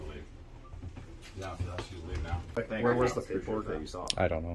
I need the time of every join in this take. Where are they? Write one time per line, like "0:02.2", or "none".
0:02.6